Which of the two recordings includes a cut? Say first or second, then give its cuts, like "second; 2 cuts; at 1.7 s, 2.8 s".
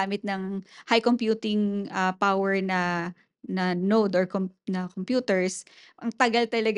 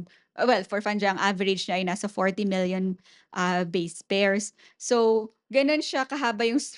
second; 1 cut; at 5.4 s